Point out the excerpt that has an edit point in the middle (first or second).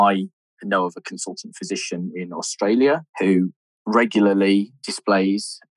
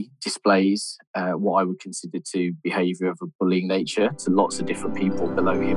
first